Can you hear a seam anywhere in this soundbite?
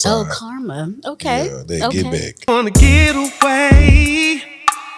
yes; 1 cut; at 2.3 s

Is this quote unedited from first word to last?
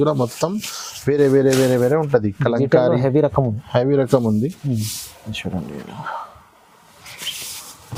yes; 0 cuts

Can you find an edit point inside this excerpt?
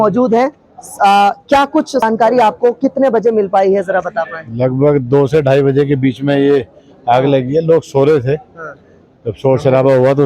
yes; 1 cut; at 2.0 s

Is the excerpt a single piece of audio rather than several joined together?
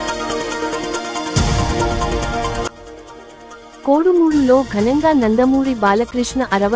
yes; 0 cuts

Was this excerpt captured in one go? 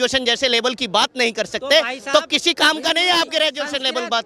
yes; 0 cuts

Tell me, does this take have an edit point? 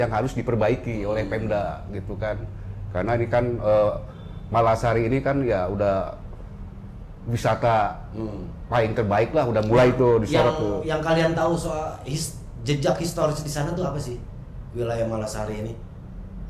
no; 0 cuts

